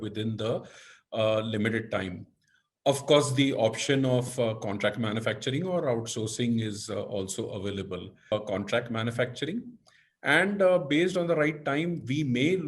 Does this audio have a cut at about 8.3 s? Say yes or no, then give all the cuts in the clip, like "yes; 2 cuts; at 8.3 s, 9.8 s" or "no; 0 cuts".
yes; 1 cut; at 8.3 s